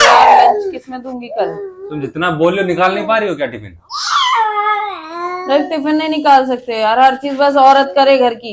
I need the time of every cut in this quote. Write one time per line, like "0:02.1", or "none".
none